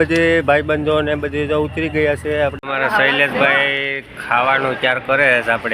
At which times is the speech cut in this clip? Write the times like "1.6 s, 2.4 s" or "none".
2.6 s